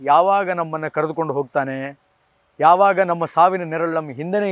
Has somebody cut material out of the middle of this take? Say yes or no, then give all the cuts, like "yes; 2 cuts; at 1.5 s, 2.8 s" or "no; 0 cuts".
no; 0 cuts